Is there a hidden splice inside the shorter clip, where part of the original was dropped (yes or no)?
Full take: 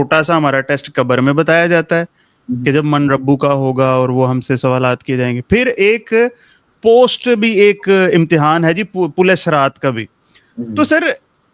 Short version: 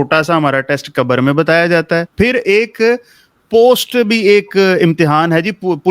yes